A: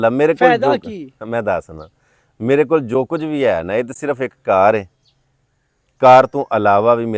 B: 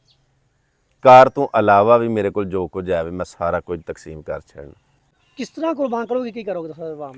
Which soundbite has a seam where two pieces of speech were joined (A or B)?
B